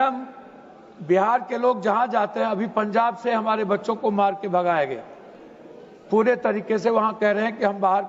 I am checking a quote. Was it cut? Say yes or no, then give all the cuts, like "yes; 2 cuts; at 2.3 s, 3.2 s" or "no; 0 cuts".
no; 0 cuts